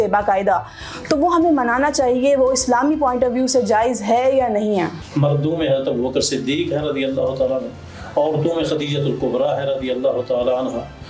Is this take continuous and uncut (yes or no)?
no